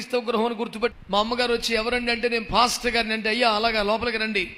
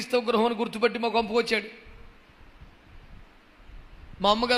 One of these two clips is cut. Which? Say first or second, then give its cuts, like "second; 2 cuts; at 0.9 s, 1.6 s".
first; 1 cut; at 0.9 s